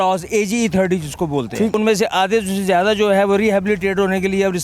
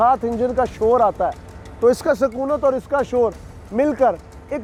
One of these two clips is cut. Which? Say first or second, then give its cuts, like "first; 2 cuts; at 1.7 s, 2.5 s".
first; 1 cut; at 1.8 s